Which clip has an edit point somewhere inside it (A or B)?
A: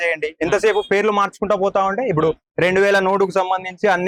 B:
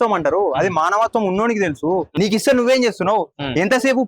B